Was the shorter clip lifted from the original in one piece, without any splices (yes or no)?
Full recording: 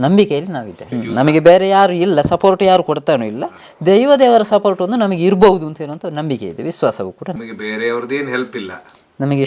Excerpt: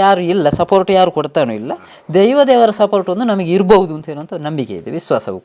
yes